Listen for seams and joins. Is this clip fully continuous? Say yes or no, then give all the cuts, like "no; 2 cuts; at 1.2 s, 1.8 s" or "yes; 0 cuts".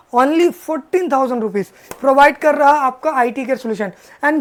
yes; 0 cuts